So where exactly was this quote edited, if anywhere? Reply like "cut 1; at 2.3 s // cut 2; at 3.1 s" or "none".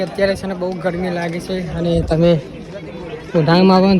none